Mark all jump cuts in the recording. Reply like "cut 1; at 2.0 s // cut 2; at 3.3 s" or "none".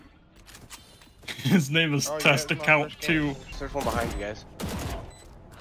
cut 1; at 3.5 s